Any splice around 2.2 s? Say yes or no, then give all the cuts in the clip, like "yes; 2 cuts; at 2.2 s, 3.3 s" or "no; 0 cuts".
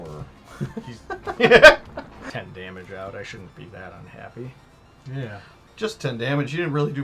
yes; 1 cut; at 2.2 s